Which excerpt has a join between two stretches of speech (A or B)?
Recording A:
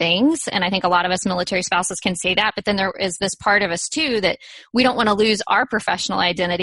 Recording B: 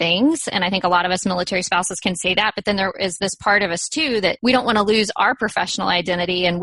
B